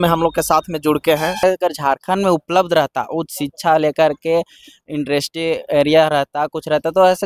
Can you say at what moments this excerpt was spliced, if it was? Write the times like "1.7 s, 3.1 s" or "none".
1.4 s